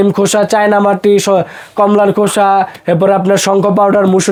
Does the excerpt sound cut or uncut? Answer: uncut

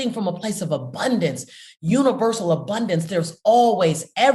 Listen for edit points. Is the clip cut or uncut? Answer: uncut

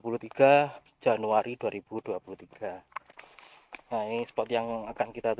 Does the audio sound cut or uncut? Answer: cut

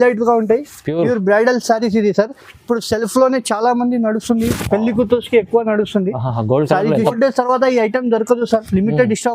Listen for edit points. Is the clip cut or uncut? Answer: cut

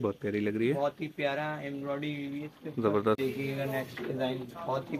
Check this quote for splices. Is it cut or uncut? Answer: cut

